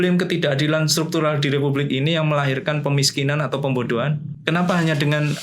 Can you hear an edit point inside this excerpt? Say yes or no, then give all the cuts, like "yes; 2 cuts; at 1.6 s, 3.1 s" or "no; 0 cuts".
yes; 1 cut; at 4.3 s